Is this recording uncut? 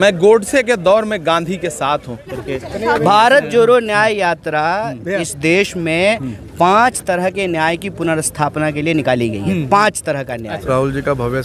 no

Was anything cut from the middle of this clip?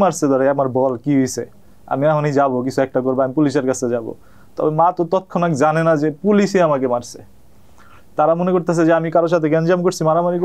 no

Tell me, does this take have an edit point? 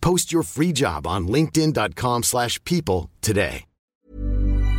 yes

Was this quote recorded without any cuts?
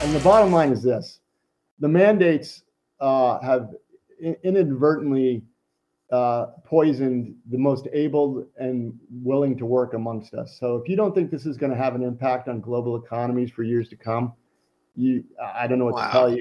yes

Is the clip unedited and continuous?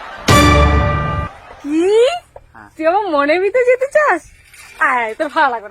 yes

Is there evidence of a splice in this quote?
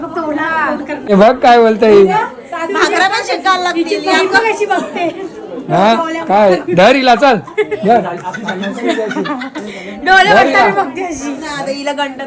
yes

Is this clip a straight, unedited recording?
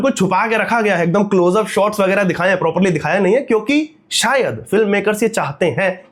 yes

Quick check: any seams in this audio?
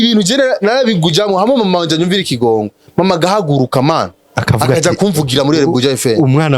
no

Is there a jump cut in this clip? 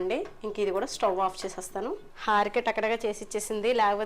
yes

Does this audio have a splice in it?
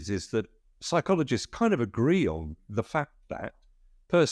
no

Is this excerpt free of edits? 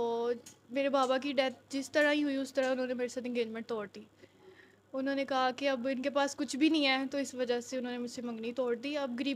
yes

